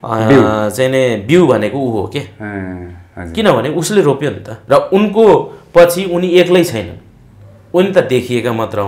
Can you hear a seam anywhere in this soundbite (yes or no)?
yes